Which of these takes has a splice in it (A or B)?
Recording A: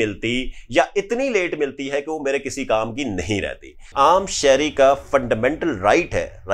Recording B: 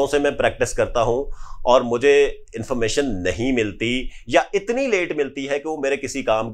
A